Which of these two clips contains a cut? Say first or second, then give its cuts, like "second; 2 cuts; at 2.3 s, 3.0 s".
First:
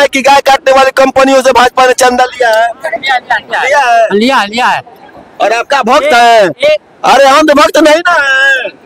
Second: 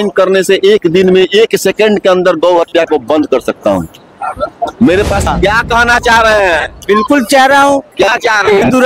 second; 1 cut; at 5.3 s